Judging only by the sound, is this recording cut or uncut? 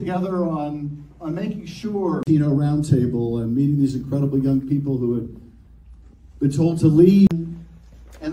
uncut